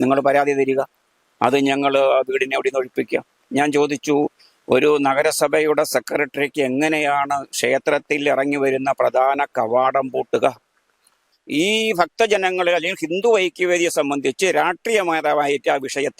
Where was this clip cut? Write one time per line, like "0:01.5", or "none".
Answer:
0:11.2